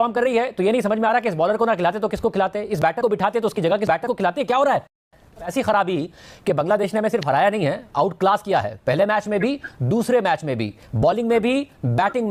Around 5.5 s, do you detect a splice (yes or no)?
yes